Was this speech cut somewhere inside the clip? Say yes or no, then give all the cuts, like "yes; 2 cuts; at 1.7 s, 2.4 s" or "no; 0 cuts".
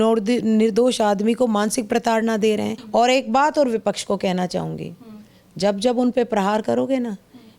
yes; 1 cut; at 2.8 s